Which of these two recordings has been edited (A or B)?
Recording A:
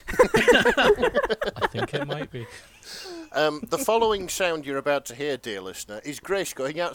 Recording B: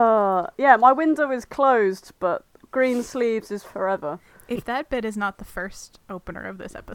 B